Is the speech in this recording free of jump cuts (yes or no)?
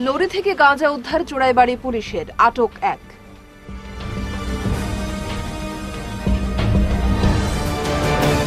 yes